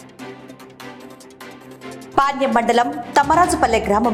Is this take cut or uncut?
uncut